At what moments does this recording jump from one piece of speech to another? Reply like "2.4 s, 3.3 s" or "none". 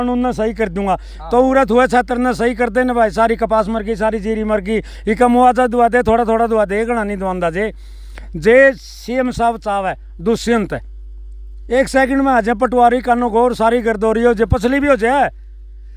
none